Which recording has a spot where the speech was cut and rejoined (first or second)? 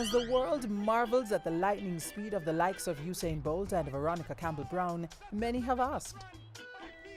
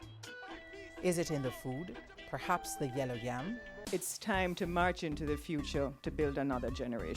second